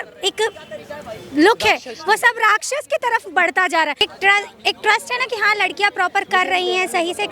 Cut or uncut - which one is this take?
cut